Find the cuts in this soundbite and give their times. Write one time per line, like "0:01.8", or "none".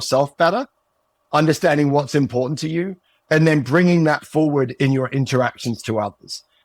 none